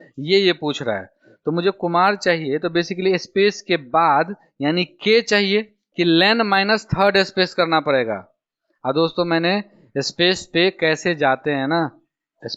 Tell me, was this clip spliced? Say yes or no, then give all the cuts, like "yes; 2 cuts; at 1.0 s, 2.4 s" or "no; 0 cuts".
yes; 1 cut; at 5.8 s